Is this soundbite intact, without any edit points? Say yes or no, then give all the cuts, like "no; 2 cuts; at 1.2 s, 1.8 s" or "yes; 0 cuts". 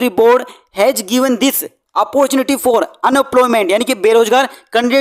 yes; 0 cuts